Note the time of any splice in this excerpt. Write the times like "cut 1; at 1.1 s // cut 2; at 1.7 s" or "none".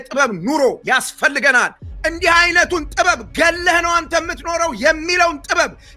cut 1; at 1.8 s